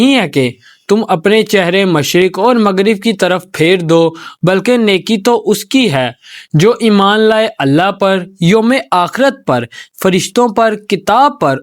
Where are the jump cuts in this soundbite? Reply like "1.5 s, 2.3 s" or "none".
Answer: 4.3 s